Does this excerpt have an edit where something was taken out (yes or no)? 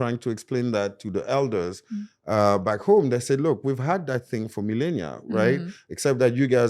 no